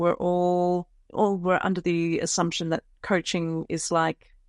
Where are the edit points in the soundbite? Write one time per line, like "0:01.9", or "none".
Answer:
0:01.0